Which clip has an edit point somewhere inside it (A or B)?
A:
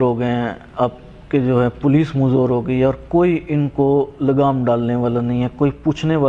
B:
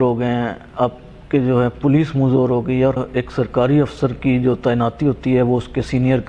B